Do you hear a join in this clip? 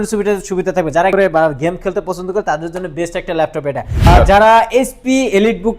yes; 2 cuts; at 1.1 s, 4.1 s

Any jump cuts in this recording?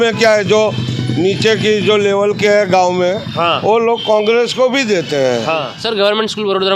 yes; 1 cut; at 5.8 s

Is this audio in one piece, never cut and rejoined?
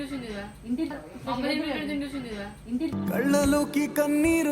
no; 2 cuts; at 0.9 s, 2.9 s

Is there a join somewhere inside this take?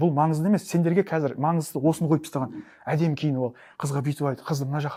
no; 0 cuts

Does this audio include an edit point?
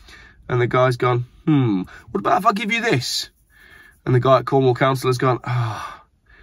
no; 0 cuts

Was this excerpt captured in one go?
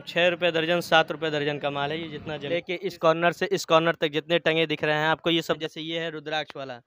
no; 2 cuts; at 2.5 s, 5.6 s

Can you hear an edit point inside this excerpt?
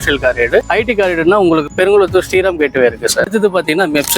yes; 1 cut; at 3.3 s

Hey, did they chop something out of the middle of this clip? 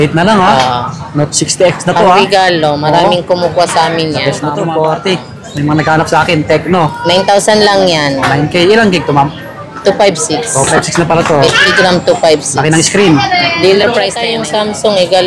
yes; 2 cuts; at 4.6 s, 14.2 s

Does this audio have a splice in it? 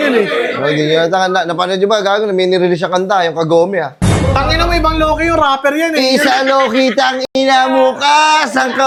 no; 0 cuts

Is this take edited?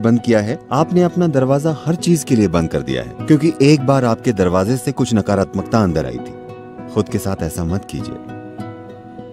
no; 0 cuts

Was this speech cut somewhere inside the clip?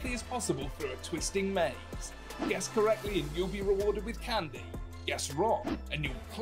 no; 0 cuts

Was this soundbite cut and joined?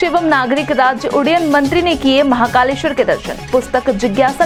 no; 0 cuts

